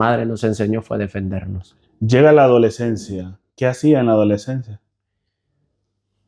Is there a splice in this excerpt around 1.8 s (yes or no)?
no